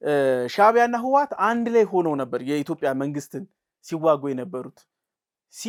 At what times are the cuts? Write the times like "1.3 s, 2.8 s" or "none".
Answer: none